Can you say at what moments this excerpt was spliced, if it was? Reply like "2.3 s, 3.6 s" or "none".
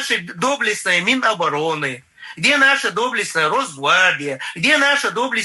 none